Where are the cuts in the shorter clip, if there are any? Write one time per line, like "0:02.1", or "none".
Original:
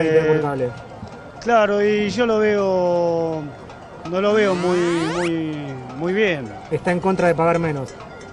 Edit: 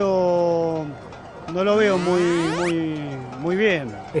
none